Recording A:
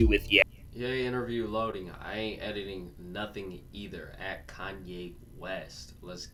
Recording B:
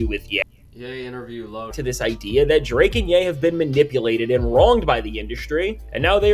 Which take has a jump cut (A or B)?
B